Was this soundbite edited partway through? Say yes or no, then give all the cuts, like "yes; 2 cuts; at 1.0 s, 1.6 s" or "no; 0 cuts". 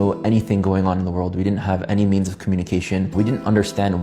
yes; 1 cut; at 3.1 s